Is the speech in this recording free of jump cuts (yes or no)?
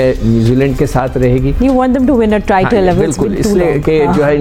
yes